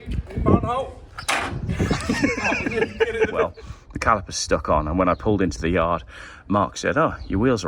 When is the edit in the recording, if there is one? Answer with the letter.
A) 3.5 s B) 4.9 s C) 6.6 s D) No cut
A